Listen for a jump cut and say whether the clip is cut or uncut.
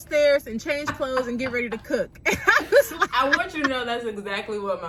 uncut